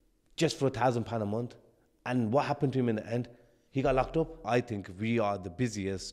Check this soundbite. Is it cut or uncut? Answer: cut